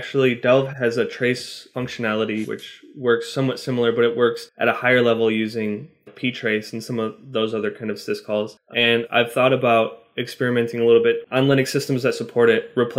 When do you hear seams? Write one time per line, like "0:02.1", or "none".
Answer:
0:02.5
0:04.5
0:08.6
0:11.2